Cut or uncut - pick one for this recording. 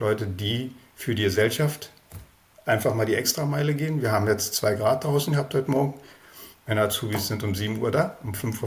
uncut